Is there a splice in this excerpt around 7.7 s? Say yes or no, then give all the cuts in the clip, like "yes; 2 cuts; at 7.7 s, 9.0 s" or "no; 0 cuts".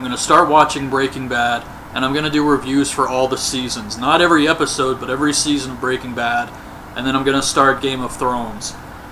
yes; 1 cut; at 7.7 s